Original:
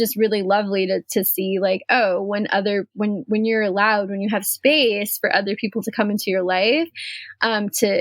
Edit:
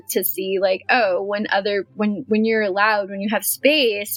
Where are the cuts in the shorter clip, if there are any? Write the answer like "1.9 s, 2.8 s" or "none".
none